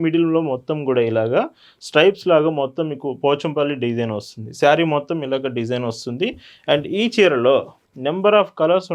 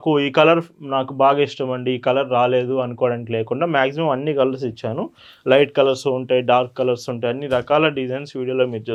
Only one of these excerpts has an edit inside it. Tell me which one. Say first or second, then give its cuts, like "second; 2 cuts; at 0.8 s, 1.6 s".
first; 1 cut; at 7.9 s